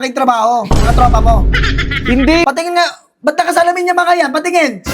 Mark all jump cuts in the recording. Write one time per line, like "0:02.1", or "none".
0:02.4